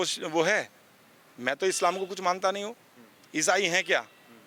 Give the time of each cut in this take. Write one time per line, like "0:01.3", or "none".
none